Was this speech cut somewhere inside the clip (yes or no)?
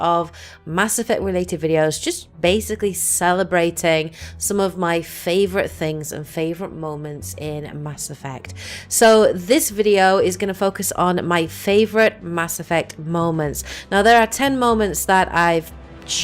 yes